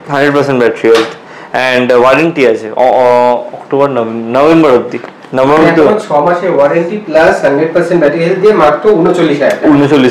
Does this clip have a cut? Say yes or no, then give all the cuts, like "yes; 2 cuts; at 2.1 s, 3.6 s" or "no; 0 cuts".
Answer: no; 0 cuts